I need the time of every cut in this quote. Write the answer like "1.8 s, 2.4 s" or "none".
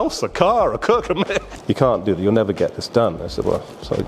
1.5 s